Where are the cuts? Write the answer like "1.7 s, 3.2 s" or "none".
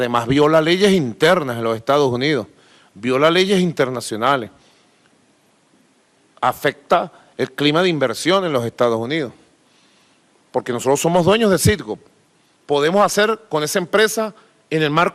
3.4 s